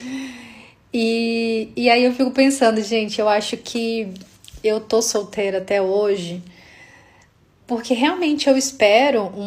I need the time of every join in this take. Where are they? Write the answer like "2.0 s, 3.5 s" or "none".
none